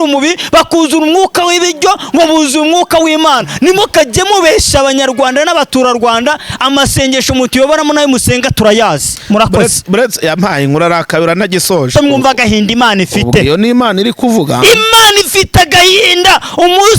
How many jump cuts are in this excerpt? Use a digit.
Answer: 1